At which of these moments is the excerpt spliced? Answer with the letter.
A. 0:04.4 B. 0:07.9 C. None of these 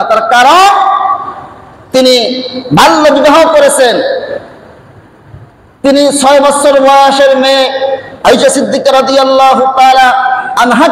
C